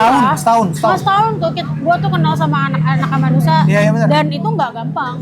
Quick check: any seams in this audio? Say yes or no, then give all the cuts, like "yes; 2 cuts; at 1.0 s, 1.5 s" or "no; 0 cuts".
no; 0 cuts